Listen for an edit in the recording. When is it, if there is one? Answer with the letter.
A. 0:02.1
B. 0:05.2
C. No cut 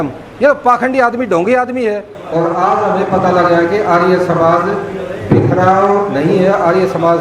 A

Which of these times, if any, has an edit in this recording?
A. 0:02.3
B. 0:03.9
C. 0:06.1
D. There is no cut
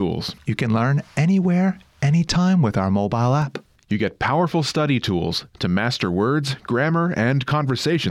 D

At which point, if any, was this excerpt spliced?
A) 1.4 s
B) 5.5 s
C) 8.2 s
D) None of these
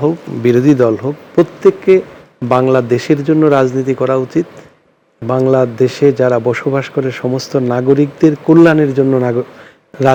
D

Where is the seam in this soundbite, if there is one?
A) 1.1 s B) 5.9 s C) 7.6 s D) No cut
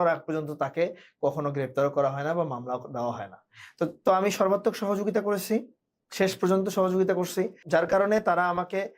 C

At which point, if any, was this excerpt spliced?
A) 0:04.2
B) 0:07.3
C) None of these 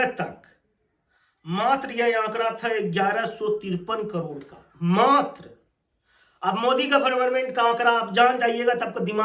C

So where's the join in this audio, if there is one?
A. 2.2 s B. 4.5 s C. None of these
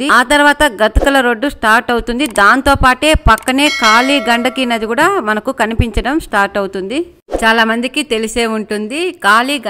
C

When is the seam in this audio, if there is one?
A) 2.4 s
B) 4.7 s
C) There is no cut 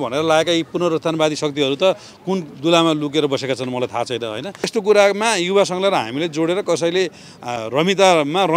B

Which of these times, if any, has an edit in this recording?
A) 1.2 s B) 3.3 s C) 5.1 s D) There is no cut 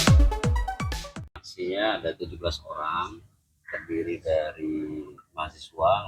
A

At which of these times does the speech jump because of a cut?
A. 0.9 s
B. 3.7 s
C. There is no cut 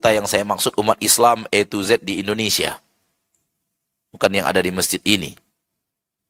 C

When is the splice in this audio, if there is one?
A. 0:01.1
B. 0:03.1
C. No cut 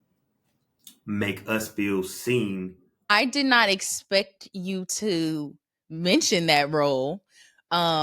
B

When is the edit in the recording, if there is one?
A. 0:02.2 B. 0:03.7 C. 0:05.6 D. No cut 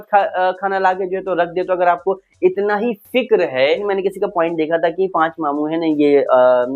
B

